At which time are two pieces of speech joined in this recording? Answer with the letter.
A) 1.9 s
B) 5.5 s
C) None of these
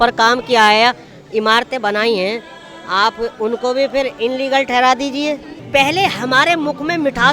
B